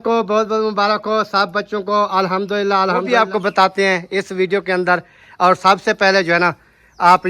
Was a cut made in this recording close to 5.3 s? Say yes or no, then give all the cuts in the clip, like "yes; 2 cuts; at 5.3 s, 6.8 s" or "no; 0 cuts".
no; 1 cut; at 3.1 s